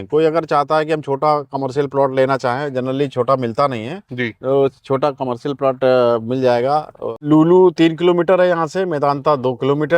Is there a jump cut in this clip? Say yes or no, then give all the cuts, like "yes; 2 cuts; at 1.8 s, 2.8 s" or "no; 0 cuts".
yes; 1 cut; at 7.1 s